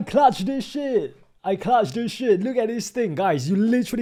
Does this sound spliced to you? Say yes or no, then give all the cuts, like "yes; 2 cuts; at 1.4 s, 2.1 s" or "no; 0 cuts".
no; 0 cuts